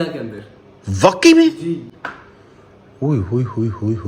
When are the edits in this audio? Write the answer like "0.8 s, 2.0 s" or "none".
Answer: none